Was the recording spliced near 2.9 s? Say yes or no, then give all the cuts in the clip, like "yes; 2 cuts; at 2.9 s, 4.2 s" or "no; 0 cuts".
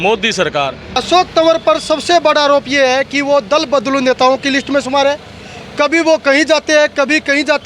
no; 1 cut; at 1.0 s